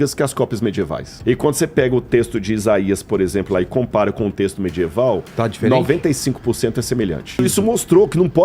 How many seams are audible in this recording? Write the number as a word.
two